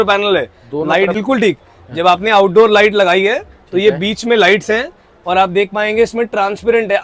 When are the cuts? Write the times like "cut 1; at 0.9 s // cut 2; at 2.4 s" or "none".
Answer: none